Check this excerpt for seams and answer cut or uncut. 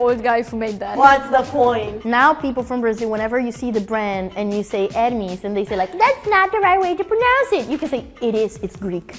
cut